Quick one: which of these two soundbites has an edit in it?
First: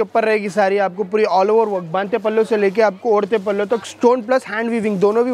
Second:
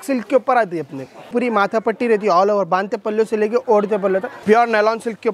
second; 2 cuts; at 1.3 s, 4.3 s

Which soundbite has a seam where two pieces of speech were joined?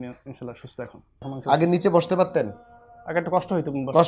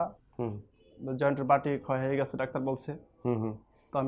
first; 1 cut; at 1.2 s

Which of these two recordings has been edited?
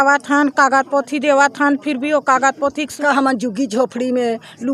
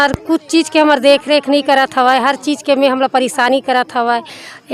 first; 1 cut; at 2.9 s

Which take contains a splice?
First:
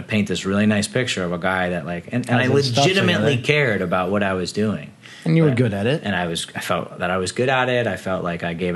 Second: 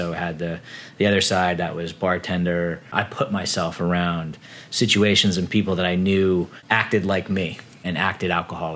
second; 3 cuts; at 2.9 s, 6.6 s, 7.8 s

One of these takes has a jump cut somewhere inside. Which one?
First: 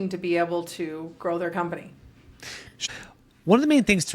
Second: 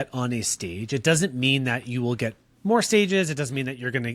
first; 1 cut; at 2.9 s

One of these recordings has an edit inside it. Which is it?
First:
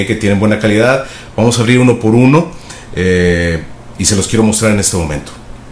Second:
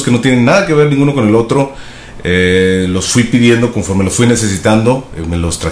first; 1 cut; at 4.0 s

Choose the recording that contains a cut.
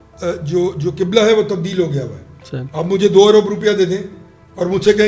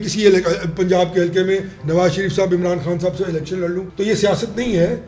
second; 1 cut; at 3.9 s

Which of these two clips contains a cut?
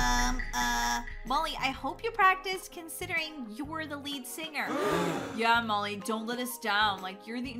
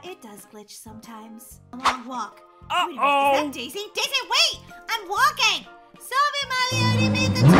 second; 1 cut; at 1.6 s

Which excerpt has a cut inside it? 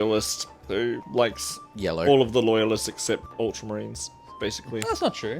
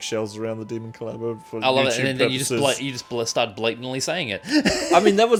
first; 2 cuts; at 1.0 s, 3.3 s

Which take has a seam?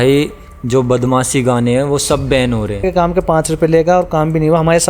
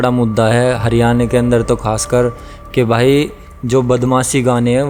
first; 1 cut; at 2.8 s

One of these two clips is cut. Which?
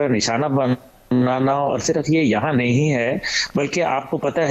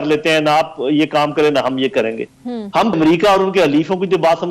second; 1 cut; at 2.9 s

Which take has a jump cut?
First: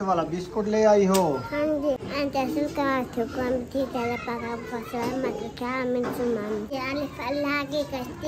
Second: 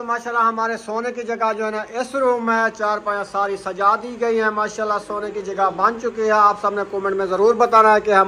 first; 2 cuts; at 2.0 s, 6.7 s

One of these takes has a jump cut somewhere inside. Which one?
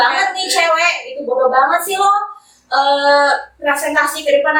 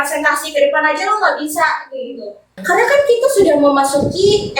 second; 1 cut; at 2.6 s

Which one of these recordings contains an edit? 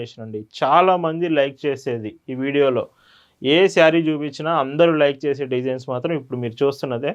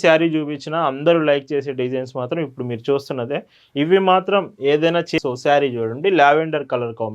second; 1 cut; at 5.1 s

